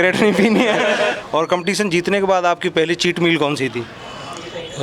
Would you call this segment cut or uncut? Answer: cut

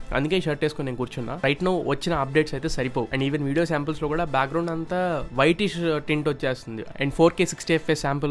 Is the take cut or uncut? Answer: cut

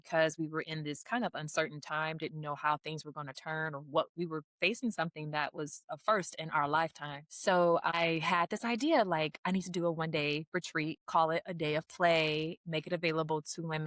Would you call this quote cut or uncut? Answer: uncut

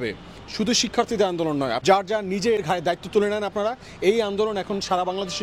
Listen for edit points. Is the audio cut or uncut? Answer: cut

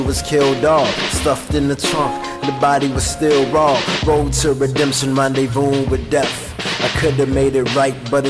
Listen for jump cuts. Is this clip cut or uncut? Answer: cut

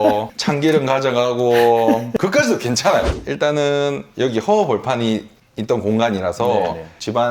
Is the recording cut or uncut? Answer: cut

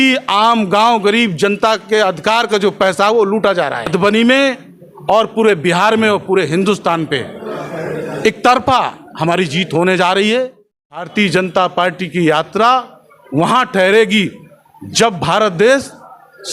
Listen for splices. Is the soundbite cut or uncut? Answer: cut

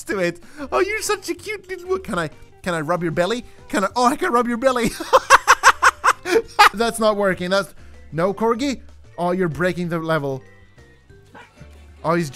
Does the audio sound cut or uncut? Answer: cut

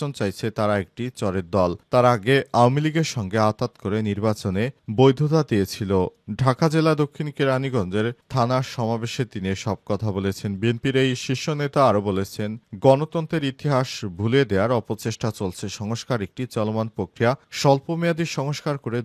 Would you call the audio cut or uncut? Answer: uncut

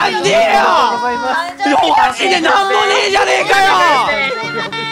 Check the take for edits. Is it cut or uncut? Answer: uncut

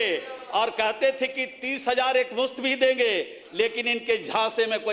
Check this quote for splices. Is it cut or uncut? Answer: uncut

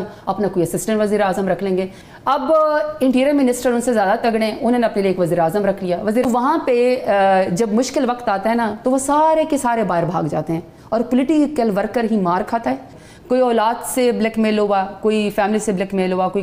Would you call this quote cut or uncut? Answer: cut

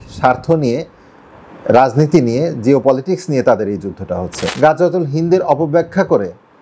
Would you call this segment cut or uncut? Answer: cut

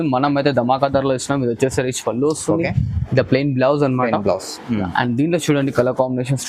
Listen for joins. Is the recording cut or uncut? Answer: uncut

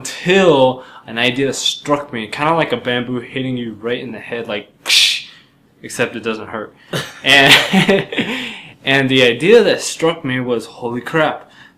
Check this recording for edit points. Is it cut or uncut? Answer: cut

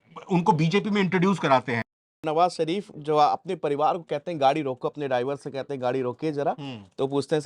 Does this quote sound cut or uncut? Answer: cut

